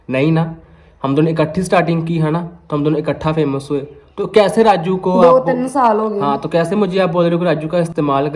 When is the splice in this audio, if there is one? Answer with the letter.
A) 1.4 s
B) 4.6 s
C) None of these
C